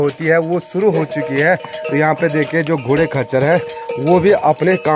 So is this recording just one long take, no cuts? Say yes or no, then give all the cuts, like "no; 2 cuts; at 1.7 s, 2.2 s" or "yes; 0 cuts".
yes; 0 cuts